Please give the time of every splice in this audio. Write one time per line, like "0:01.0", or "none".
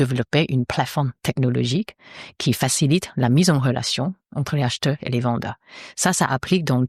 none

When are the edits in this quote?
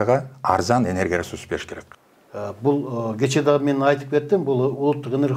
0:01.8

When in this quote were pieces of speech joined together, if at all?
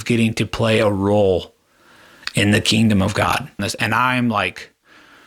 0:03.6

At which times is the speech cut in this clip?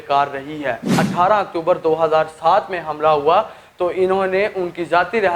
0:01.0

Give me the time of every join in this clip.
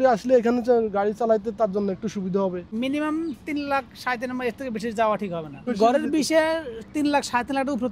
0:02.6
0:05.7

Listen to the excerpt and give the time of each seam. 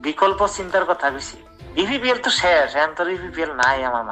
0:01.8

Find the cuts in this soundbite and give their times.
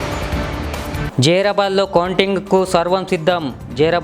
none

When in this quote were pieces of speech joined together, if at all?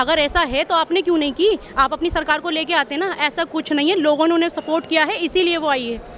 none

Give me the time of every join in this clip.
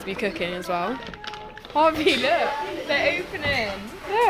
0:01.7

